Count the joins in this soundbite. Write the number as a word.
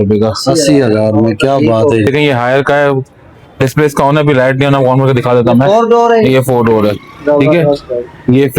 one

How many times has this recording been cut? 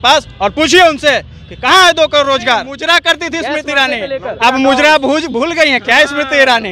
one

